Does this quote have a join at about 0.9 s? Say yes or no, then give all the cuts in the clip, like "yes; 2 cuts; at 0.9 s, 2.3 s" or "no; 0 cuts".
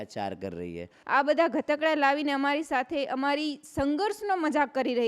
yes; 1 cut; at 0.9 s